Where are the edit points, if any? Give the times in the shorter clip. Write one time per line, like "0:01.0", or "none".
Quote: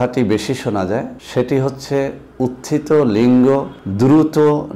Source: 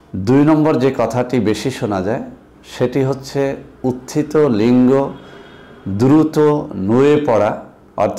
0:01.2
0:03.8